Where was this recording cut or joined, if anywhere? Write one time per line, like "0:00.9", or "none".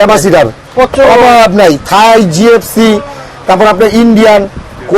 none